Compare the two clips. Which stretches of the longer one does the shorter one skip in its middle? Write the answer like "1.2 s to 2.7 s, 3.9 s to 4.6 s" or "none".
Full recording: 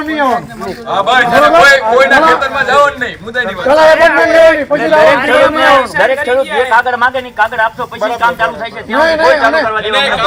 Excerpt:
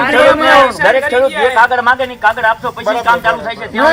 none